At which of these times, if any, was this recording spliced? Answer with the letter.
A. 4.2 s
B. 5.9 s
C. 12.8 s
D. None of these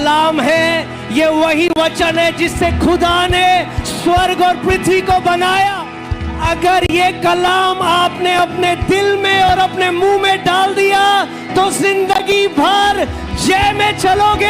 B